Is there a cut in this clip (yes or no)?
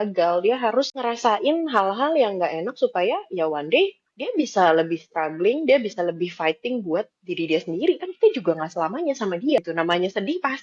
yes